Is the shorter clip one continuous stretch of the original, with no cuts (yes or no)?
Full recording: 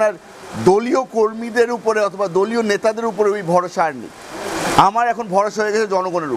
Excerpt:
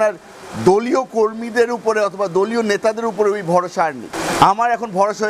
no